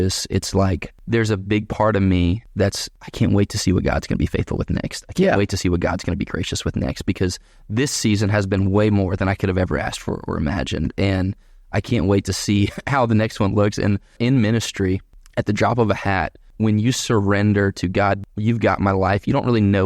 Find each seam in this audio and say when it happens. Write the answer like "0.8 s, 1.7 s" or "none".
0.9 s, 2.6 s, 14.2 s, 15.2 s, 16.5 s, 18.2 s